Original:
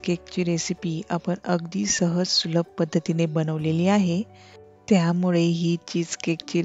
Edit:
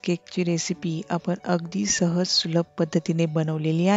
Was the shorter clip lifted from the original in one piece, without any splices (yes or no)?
yes